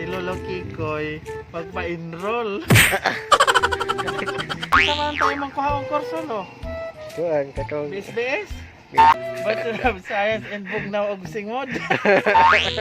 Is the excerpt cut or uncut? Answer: cut